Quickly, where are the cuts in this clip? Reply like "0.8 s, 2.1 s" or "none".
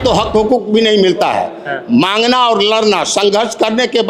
none